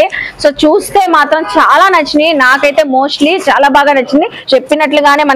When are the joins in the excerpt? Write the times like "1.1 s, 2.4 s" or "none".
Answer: 4.4 s